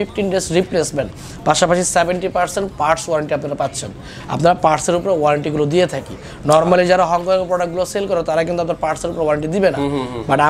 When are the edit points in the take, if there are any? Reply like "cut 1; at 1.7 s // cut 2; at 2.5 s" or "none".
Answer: none